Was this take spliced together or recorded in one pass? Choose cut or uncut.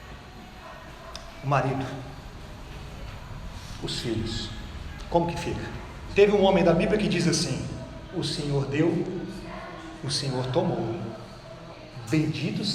cut